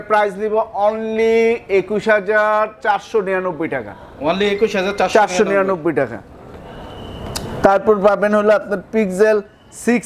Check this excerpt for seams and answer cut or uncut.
uncut